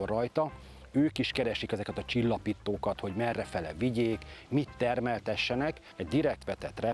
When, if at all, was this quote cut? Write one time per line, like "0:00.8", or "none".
0:05.9